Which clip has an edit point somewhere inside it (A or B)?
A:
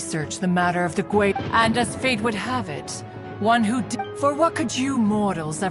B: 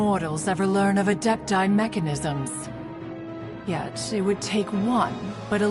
A